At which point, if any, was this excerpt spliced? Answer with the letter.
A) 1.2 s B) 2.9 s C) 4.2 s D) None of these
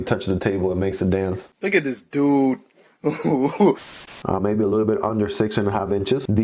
C